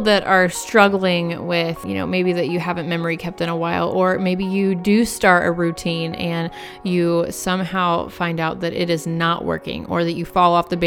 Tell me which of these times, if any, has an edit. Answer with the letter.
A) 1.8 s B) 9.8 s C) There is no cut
A